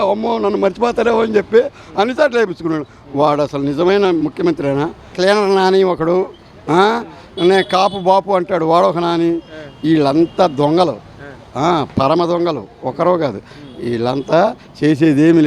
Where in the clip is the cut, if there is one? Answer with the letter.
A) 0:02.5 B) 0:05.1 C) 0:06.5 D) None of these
B